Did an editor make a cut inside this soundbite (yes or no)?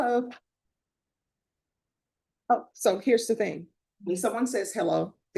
no